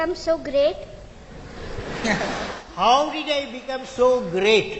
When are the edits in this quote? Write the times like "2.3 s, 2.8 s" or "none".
none